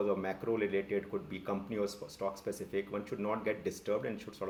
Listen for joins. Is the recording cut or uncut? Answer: uncut